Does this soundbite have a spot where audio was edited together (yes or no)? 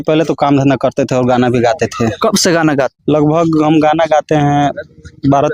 yes